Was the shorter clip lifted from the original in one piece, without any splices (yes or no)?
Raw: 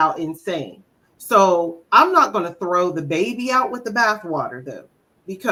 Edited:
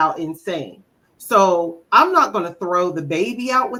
yes